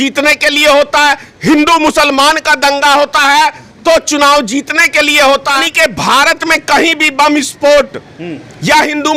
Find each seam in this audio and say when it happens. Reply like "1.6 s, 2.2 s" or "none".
5.6 s